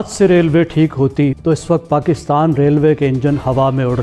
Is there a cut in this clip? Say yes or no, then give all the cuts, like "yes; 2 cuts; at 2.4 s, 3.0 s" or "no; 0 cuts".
yes; 1 cut; at 1.4 s